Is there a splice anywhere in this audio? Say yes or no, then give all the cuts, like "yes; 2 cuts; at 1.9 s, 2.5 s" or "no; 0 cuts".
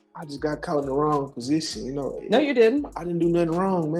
no; 0 cuts